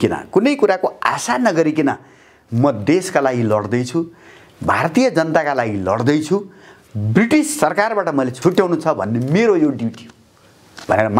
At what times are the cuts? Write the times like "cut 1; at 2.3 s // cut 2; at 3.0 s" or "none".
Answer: cut 1; at 8.3 s